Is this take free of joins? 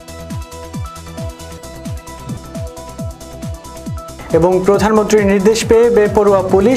yes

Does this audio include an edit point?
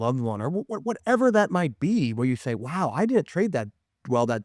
no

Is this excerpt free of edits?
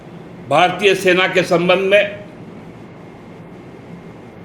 yes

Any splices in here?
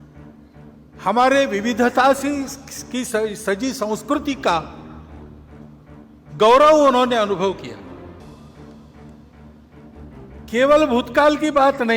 no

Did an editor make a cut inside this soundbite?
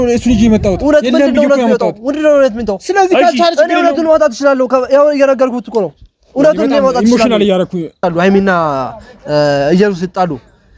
yes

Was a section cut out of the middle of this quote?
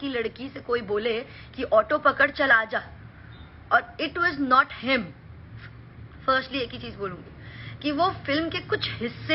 no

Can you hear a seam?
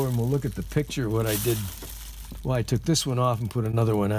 no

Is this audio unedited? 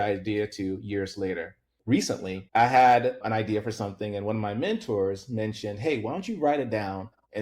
no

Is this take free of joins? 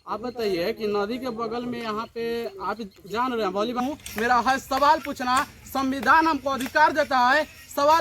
no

